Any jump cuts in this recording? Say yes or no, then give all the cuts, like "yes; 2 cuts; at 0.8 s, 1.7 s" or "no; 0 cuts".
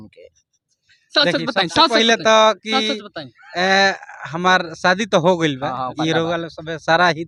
no; 0 cuts